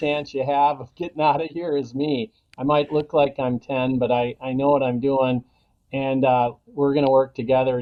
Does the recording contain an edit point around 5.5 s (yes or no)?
no